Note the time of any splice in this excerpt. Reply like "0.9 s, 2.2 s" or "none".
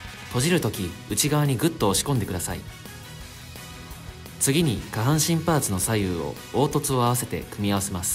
2.7 s, 4.3 s